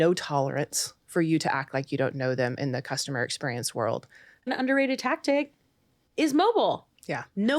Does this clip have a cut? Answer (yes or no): yes